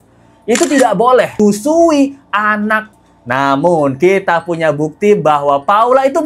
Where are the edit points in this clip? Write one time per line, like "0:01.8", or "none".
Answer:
0:01.4
0:02.9